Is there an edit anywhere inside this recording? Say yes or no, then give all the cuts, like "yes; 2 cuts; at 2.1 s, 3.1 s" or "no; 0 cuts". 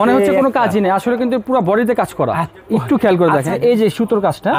yes; 1 cut; at 3.5 s